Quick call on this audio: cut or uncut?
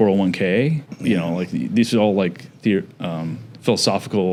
uncut